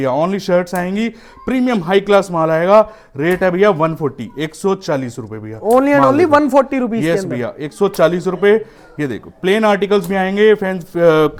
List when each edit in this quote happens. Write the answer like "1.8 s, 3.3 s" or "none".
none